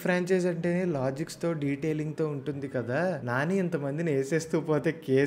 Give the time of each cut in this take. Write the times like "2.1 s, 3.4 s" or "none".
3.2 s